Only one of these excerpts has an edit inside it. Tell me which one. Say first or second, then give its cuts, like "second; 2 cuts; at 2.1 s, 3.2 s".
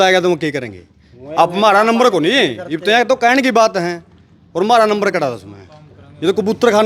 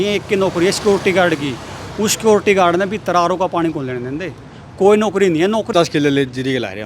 second; 1 cut; at 5.7 s